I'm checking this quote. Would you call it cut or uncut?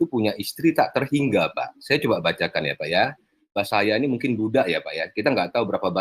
cut